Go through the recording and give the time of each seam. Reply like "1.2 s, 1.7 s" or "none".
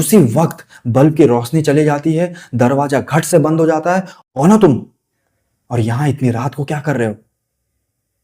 4.1 s